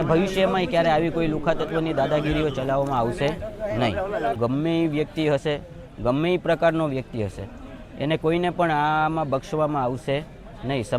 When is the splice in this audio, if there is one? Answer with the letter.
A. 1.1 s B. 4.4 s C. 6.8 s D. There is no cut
B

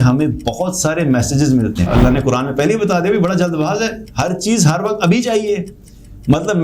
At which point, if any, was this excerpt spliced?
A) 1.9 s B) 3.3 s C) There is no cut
A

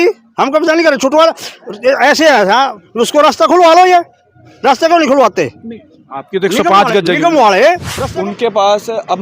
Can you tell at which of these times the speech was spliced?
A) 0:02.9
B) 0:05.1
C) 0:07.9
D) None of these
C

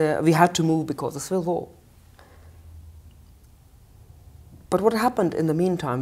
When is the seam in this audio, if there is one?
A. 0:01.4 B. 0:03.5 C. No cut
A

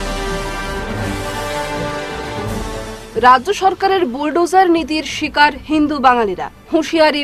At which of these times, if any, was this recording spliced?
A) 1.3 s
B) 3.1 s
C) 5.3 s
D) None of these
D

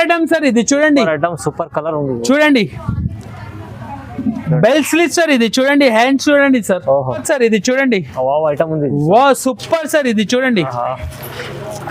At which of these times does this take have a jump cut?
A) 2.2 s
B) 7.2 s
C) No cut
B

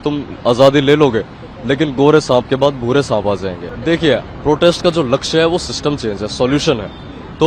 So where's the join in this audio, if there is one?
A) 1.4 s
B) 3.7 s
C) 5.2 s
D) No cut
B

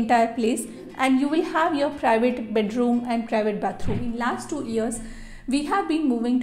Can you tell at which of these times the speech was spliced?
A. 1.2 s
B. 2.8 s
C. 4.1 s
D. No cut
C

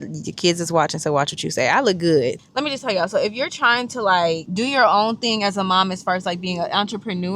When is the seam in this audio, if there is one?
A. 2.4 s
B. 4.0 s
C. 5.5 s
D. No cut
A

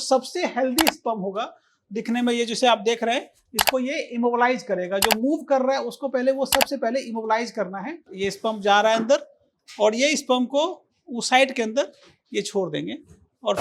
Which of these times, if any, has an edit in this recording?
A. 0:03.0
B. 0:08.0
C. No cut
B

